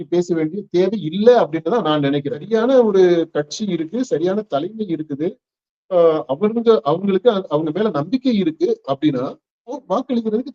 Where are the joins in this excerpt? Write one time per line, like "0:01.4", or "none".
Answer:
0:02.4